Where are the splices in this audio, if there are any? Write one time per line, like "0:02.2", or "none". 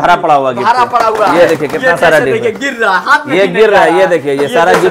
none